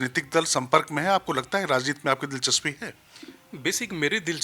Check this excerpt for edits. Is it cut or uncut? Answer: uncut